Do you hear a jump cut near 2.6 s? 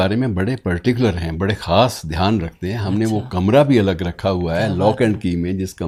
no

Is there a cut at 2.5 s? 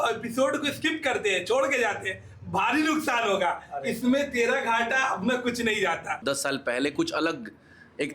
no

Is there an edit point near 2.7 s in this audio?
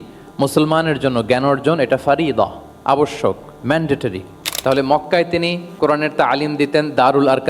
no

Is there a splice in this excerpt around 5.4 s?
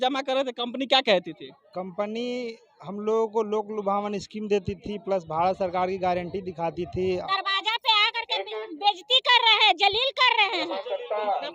no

